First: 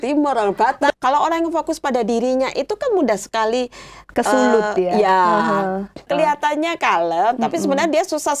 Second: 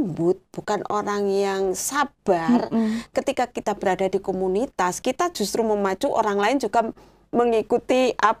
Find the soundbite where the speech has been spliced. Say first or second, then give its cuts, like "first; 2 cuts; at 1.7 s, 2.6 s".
first; 2 cuts; at 0.9 s, 6.1 s